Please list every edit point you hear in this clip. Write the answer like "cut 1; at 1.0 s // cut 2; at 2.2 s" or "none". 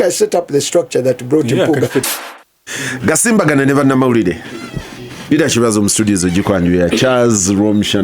cut 1; at 2.0 s